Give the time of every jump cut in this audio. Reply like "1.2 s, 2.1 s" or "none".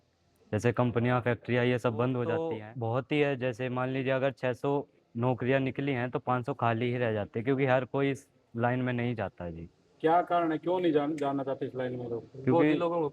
2.4 s

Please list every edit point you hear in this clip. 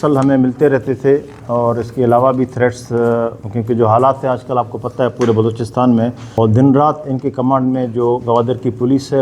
6.2 s

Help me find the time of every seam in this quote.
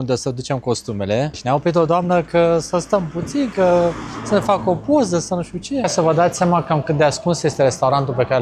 1.4 s, 5.9 s

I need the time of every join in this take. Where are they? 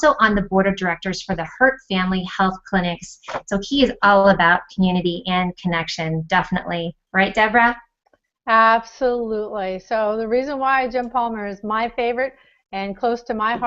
10.9 s

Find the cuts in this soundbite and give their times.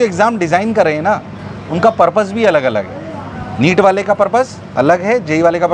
none

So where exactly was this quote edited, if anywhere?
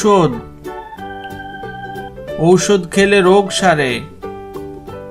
4.0 s

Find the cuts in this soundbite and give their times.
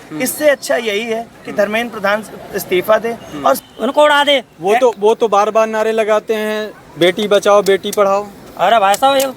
3.7 s

